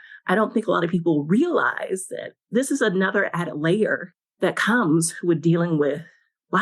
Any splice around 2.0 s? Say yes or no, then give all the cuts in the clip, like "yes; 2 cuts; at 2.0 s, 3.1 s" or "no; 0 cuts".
no; 1 cut; at 4.0 s